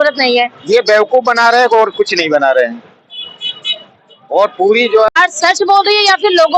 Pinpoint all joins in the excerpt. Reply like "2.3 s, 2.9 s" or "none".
5.1 s